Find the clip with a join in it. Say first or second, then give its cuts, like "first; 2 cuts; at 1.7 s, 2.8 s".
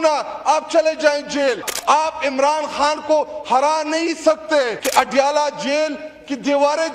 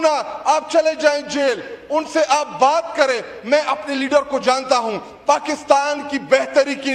first; 2 cuts; at 1.7 s, 4.8 s